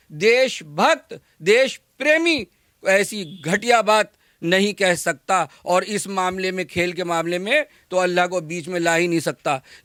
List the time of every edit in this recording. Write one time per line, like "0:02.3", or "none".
none